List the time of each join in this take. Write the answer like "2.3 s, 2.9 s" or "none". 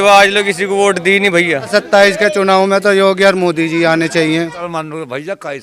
1.7 s, 4.6 s